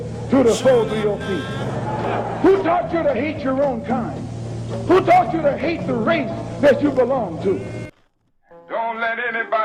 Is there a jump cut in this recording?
yes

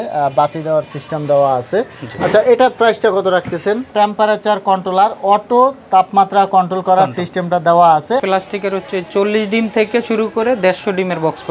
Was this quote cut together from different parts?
yes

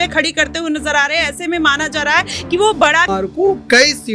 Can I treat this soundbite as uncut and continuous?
no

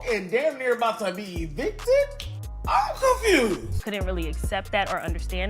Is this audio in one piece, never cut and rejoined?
no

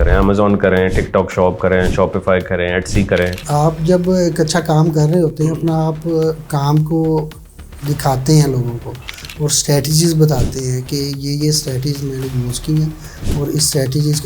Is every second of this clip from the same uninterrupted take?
no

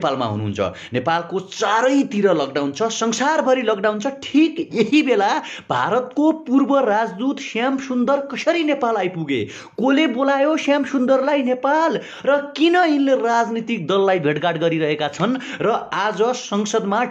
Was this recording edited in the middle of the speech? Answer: no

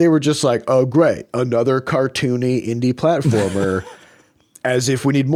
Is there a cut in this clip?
no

